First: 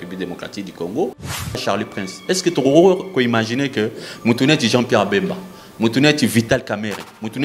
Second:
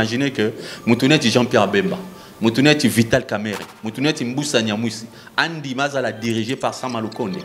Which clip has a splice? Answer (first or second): first